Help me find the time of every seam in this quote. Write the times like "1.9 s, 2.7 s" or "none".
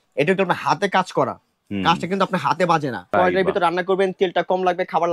3.1 s